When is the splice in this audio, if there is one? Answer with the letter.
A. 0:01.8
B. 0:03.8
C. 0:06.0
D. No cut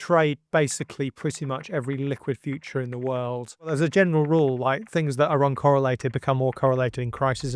B